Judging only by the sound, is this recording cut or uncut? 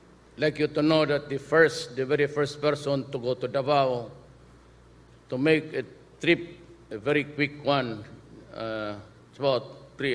uncut